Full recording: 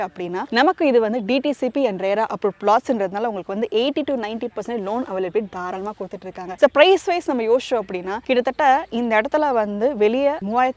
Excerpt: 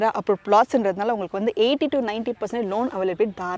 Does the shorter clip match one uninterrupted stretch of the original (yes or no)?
yes